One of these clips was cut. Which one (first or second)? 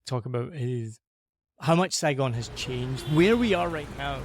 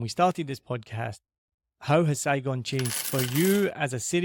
first